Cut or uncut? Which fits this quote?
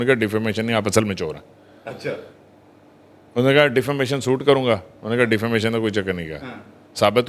uncut